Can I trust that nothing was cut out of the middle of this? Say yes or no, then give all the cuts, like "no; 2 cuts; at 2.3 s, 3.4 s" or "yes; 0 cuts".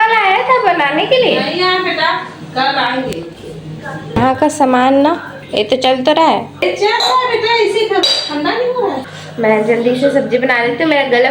no; 3 cuts; at 4.2 s, 6.6 s, 9.2 s